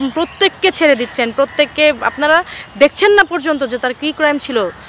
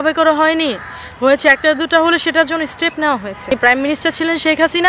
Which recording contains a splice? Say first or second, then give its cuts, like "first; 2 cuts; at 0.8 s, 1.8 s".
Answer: second; 1 cut; at 3.5 s